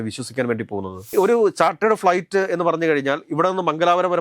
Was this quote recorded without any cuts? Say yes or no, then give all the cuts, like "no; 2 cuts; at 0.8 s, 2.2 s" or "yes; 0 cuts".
no; 1 cut; at 1.0 s